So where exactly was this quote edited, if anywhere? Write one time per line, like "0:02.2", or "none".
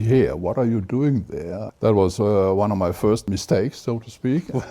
0:01.6
0:03.2